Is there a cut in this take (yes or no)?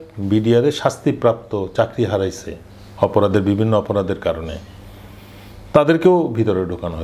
no